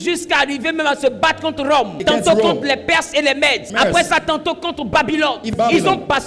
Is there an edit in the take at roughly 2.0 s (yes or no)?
yes